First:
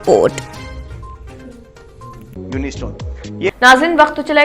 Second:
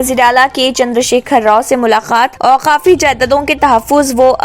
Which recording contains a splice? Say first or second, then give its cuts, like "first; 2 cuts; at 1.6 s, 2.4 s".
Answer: first; 1 cut; at 3.5 s